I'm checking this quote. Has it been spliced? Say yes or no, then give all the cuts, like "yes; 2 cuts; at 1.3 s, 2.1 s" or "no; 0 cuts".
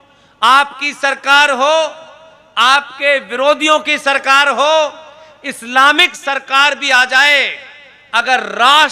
no; 0 cuts